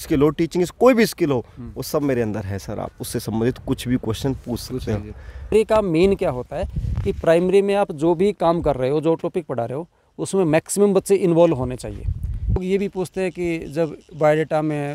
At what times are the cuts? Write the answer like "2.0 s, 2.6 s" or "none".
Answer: 5.5 s, 12.6 s